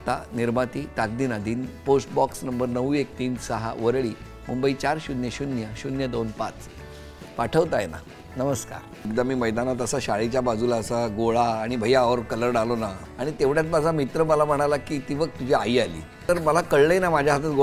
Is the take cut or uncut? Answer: cut